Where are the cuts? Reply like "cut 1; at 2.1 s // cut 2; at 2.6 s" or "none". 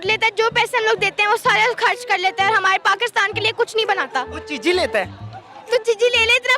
none